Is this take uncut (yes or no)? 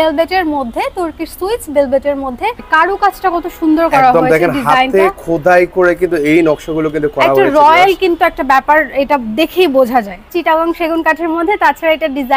no